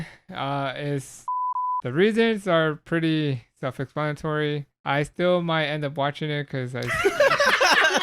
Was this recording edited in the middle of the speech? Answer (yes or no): yes